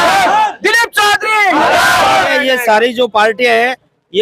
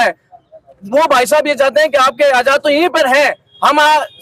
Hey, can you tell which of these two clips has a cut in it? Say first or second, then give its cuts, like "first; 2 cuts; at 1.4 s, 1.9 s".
first; 1 cut; at 2.3 s